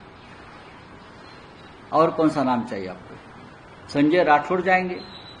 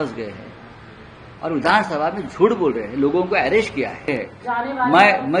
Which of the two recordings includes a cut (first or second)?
second